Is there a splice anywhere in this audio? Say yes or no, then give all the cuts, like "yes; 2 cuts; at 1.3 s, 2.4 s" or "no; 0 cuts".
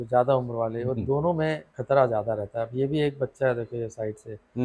yes; 1 cut; at 1.7 s